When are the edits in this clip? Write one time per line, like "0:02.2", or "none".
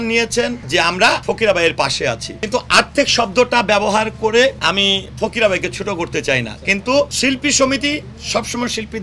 0:01.1
0:02.3
0:04.6
0:07.1